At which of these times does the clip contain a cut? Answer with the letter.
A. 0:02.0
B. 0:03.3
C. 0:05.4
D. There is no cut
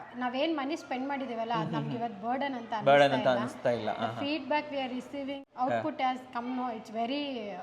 C